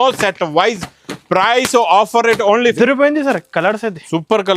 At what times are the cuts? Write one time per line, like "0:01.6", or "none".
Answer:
0:02.7